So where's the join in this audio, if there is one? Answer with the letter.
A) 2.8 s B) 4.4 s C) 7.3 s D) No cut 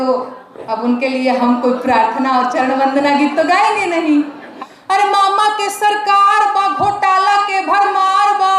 B